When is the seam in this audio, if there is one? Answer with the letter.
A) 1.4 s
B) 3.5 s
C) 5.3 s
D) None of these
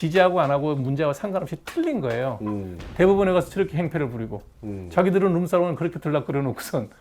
D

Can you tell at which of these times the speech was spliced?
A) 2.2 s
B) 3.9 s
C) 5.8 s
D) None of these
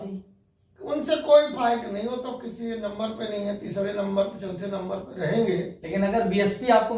C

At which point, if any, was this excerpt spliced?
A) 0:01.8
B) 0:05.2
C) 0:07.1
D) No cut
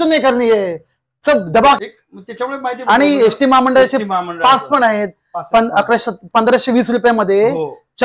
A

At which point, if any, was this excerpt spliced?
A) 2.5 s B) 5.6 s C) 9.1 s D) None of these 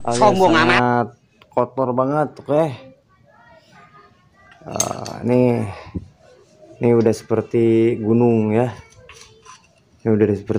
D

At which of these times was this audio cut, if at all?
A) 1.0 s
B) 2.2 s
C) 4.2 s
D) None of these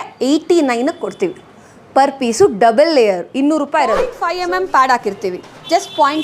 C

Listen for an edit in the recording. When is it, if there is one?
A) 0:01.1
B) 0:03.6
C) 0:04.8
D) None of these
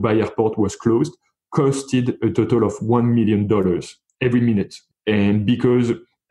C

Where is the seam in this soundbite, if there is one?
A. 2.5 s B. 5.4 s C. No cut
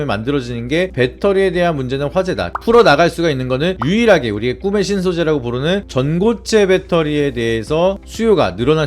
A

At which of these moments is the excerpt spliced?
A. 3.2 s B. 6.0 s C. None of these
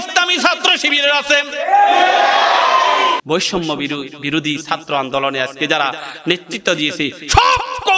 A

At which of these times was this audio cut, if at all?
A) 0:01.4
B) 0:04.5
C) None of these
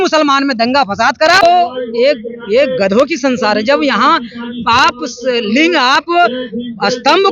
A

